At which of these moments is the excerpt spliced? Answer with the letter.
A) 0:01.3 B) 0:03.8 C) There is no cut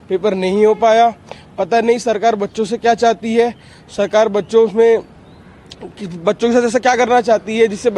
C